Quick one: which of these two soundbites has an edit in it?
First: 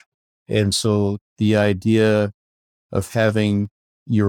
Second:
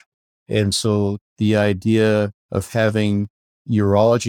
second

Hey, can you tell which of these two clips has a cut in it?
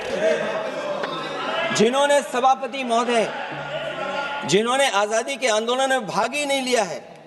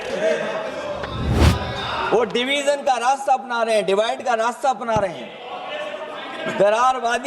second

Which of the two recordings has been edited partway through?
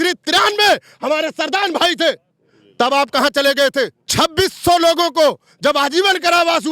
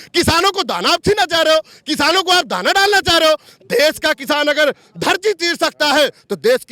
first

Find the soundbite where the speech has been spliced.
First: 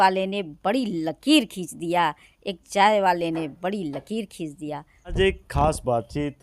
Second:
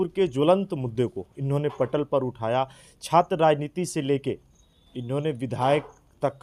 first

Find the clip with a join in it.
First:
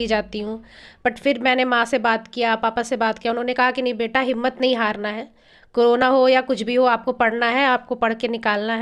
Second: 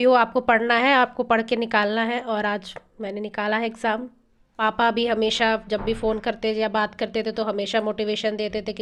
second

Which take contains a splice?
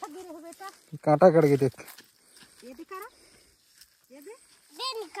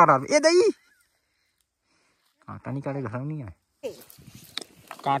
second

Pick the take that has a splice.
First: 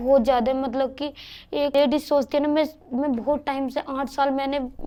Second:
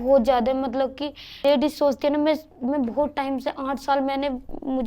second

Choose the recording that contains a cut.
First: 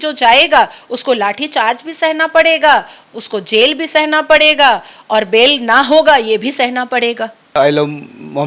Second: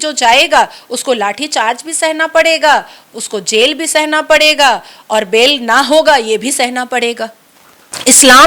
second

